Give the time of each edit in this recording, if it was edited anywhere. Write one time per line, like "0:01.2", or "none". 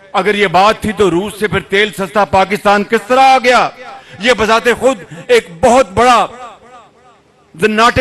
none